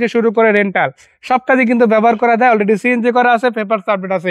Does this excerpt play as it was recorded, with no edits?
yes; 0 cuts

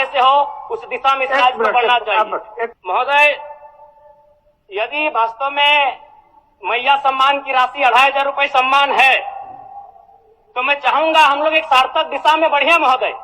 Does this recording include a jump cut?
yes; 1 cut; at 2.8 s

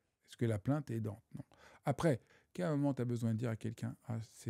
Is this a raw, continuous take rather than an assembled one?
no; 1 cut; at 2.4 s

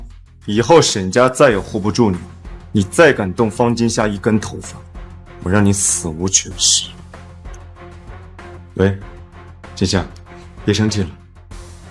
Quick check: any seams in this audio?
yes; 2 cuts; at 6.9 s, 8.3 s

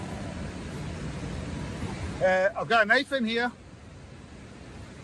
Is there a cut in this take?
yes; 1 cut; at 1.8 s

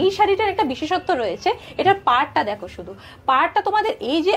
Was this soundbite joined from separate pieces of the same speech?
no; 0 cuts

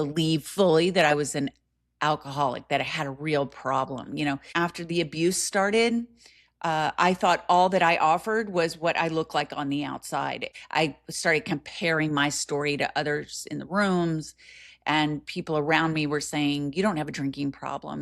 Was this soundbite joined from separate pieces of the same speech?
yes; 2 cuts; at 4.5 s, 10.5 s

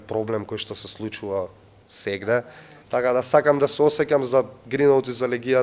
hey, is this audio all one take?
no; 1 cut; at 2.6 s

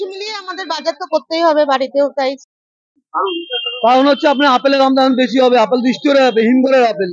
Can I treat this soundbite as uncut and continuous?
no; 1 cut; at 2.4 s

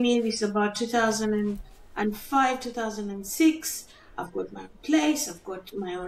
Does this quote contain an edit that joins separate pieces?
no; 0 cuts

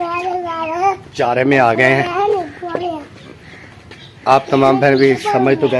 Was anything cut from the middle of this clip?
no; 0 cuts

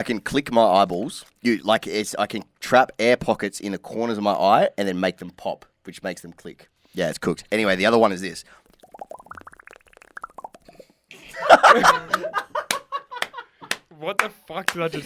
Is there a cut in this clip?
yes; 1 cut; at 1.2 s

